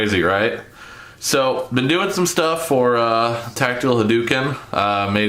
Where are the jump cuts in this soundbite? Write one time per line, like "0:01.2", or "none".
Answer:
0:03.1